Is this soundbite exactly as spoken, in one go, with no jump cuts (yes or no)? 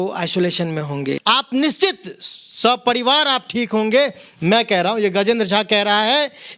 no